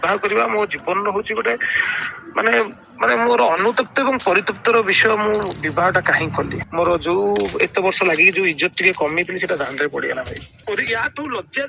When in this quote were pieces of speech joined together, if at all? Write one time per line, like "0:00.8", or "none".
0:06.6
0:10.6